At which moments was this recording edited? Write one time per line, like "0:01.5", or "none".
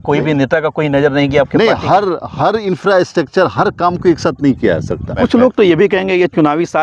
0:05.1